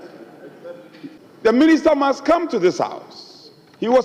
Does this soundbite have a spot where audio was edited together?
yes; 1 cut; at 1.2 s

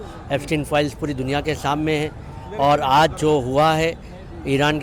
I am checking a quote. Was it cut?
no; 0 cuts

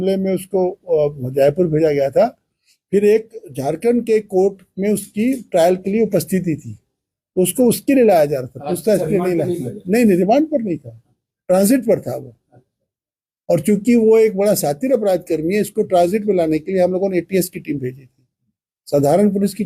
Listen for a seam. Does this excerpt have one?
no; 0 cuts

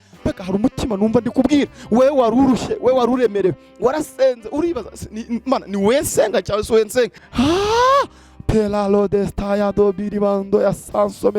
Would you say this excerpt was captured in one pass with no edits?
no; 1 cut; at 7.2 s

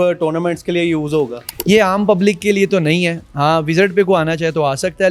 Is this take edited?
no; 0 cuts

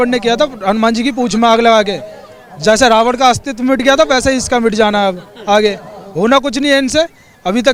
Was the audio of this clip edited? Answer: no; 0 cuts

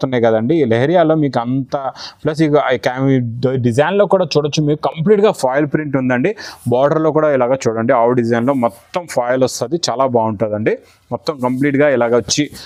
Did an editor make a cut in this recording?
no; 0 cuts

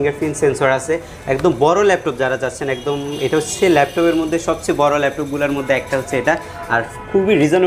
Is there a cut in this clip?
no; 0 cuts

